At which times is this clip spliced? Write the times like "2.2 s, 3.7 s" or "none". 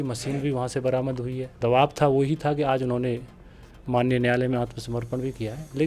1.5 s